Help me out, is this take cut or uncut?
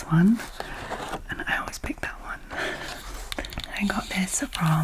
cut